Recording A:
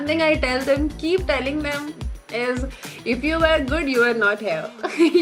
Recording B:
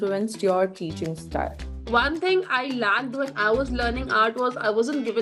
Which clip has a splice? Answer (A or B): B